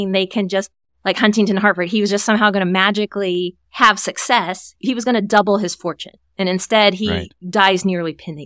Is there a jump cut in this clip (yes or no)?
yes